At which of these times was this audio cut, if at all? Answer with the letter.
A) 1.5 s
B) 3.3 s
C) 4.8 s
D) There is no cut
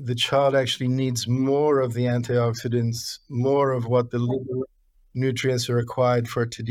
D